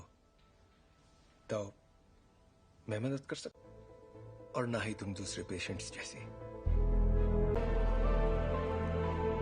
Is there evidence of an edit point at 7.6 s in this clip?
yes; 1 cut; at 7.6 s

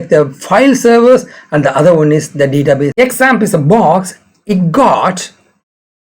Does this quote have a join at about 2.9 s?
yes; 1 cut; at 2.9 s

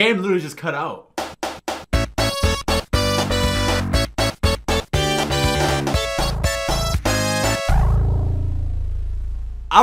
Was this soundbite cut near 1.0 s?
yes; 1 cut; at 1.0 s

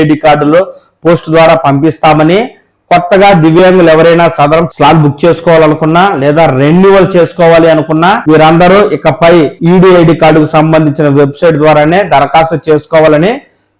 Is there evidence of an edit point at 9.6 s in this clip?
yes; 3 cuts; at 4.7 s, 8.2 s, 9.6 s

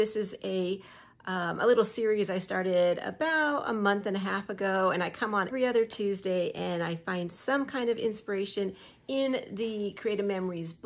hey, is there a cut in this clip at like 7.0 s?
no; 1 cut; at 5.5 s

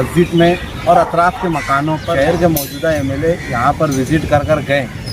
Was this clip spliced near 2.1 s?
yes; 1 cut; at 2.1 s

